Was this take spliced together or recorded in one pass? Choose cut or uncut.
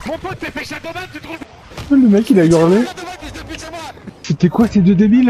cut